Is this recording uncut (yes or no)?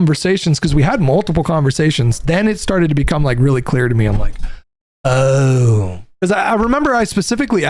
yes